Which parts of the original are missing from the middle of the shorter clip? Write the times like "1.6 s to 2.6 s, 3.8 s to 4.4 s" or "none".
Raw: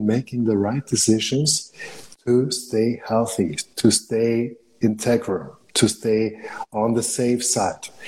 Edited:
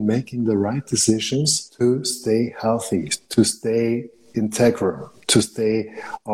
1.6 s to 2.1 s